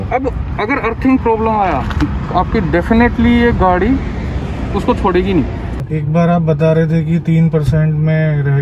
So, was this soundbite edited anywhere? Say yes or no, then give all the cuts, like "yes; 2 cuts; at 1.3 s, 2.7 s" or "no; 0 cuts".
yes; 1 cut; at 5.8 s